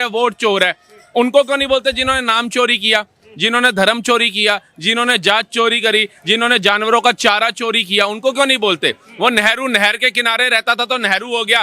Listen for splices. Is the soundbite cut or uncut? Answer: uncut